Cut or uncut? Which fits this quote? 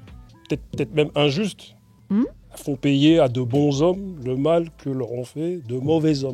uncut